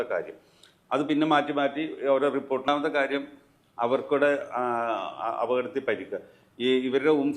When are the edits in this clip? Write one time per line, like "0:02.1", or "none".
0:02.7